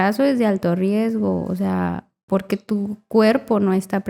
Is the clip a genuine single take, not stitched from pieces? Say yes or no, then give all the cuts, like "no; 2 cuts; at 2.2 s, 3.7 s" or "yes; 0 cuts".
no; 1 cut; at 2.1 s